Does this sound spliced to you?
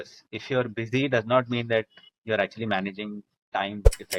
no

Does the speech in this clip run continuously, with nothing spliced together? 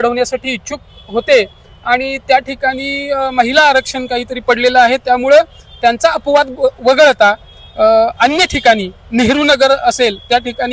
yes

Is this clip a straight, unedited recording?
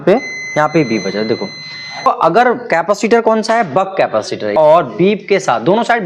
no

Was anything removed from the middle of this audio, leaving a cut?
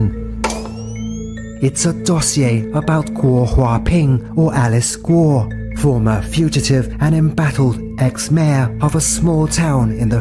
no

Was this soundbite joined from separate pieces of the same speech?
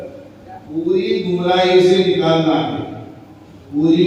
no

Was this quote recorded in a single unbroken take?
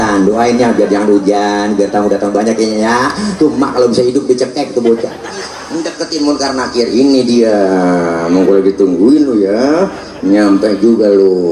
no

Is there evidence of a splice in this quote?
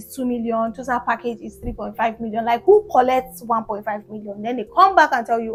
no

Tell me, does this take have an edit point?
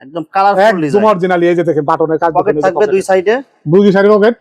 no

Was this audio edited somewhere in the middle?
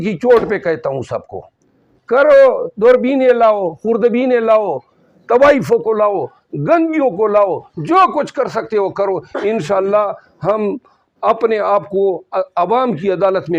no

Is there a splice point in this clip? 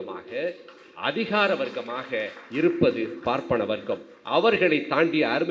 no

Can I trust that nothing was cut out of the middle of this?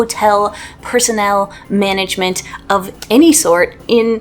yes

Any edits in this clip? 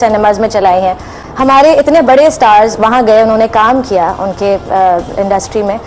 no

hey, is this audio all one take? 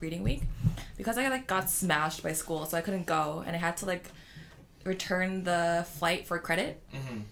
yes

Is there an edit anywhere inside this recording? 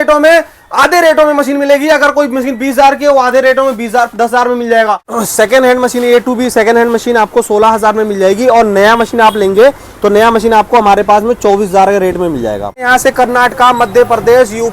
yes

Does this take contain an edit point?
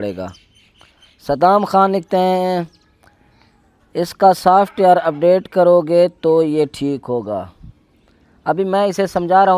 no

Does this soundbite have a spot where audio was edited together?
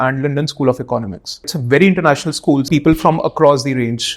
yes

